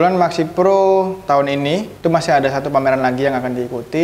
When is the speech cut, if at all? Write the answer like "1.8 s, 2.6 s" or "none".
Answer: 1.6 s

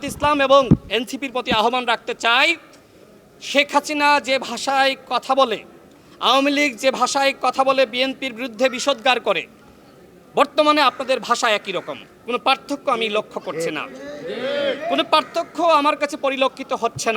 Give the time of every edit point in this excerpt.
none

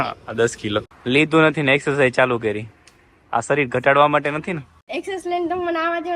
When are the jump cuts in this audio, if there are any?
0.9 s, 4.7 s

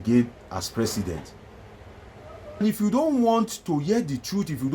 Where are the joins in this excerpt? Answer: 2.6 s

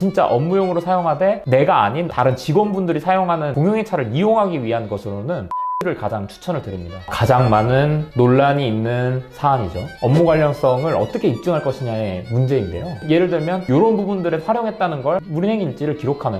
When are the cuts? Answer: 6.9 s, 12.9 s, 15.3 s

